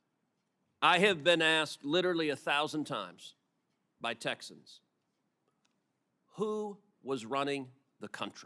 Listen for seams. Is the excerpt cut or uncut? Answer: uncut